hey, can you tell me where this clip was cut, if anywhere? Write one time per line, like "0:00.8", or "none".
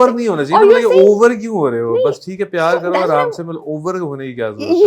none